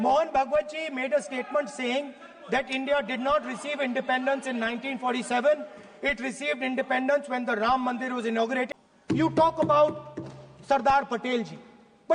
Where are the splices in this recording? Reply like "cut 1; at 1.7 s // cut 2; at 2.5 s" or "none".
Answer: cut 1; at 8.7 s